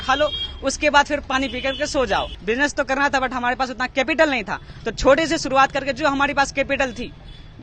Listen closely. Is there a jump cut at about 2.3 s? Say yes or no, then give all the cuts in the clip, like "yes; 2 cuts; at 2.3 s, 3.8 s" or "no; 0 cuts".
yes; 1 cut; at 2.3 s